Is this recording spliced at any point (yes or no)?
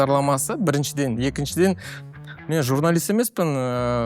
no